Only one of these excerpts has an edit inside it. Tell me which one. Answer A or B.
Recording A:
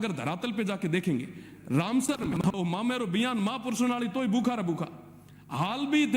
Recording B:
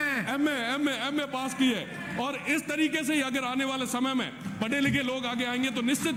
A